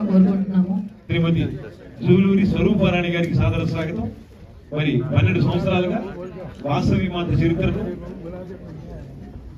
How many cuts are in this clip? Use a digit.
1